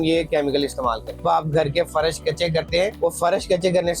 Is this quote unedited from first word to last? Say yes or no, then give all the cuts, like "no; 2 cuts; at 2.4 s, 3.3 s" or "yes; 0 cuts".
no; 2 cuts; at 1.2 s, 2.9 s